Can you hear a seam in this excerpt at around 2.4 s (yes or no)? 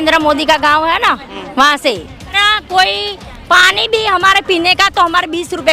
yes